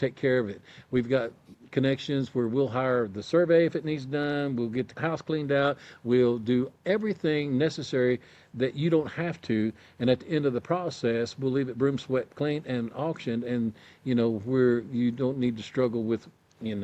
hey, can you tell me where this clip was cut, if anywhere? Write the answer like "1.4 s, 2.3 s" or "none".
4.9 s